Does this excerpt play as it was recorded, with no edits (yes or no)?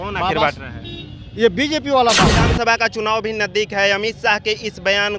no